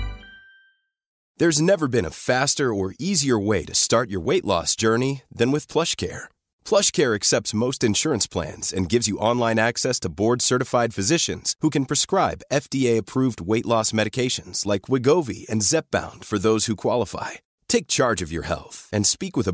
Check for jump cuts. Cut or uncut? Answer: cut